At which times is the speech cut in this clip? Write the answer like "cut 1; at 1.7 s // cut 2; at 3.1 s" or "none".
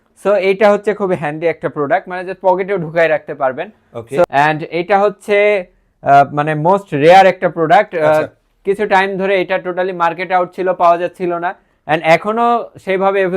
cut 1; at 4.2 s